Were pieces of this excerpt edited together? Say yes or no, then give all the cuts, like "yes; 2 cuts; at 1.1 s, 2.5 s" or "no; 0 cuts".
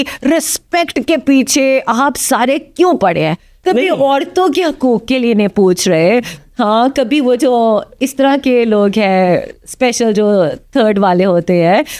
no; 0 cuts